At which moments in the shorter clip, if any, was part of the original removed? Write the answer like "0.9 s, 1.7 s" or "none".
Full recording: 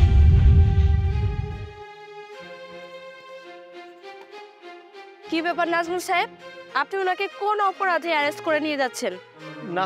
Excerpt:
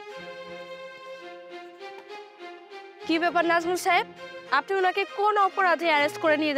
none